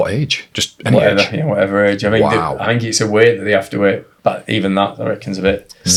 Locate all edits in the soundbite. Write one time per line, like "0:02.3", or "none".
none